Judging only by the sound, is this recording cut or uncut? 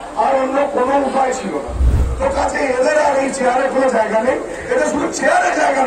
cut